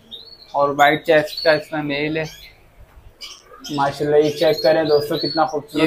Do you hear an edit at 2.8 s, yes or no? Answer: no